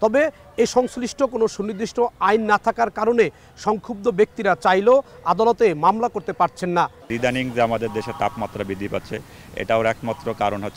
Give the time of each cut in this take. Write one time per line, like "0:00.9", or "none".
0:07.0